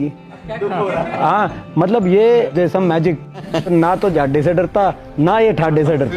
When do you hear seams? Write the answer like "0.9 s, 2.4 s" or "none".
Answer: 3.5 s